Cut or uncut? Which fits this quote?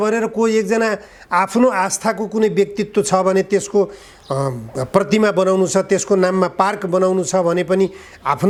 uncut